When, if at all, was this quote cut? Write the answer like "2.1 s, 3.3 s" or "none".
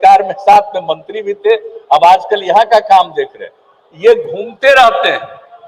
none